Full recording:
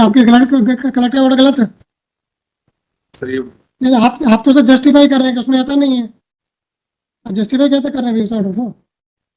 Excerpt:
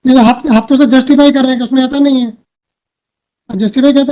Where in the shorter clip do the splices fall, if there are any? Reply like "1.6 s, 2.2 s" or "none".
none